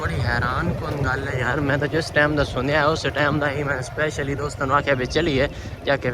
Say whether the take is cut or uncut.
uncut